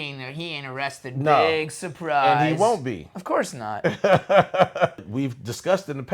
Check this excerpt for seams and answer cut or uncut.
cut